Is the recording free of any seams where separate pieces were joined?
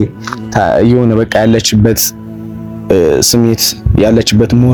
yes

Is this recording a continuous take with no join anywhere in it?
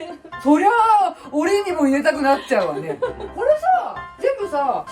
no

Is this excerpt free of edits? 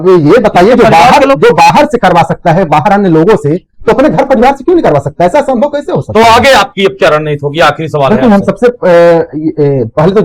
no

